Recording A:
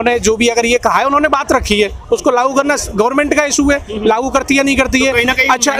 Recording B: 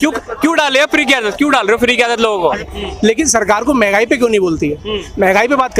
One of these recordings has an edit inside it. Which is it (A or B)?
B